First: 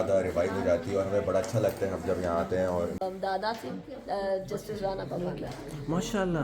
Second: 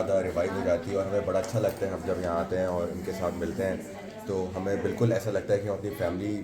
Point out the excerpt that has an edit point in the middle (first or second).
first